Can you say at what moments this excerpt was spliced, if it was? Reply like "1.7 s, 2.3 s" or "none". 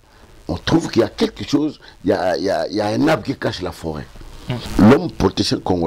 4.7 s